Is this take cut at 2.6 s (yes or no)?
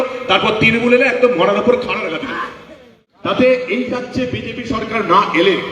yes